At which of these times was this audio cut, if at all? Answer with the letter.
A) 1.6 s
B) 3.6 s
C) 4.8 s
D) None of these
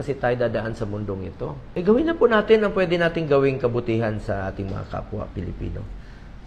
A